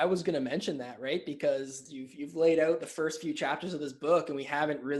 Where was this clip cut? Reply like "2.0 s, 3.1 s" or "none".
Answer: 1.8 s